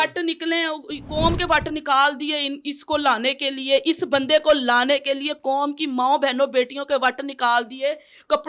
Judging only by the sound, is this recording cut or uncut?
uncut